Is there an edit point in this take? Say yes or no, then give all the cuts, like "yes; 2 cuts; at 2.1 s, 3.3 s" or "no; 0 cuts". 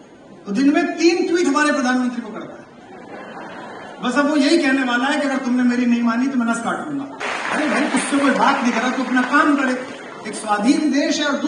yes; 1 cut; at 7.2 s